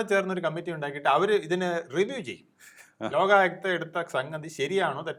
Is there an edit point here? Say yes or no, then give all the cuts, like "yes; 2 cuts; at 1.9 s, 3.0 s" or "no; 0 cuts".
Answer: no; 0 cuts